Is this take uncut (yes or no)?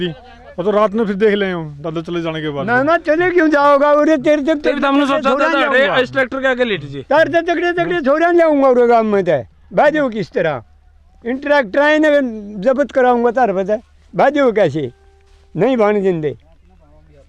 yes